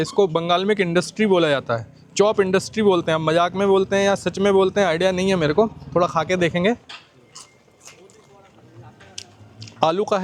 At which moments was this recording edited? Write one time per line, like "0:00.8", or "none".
none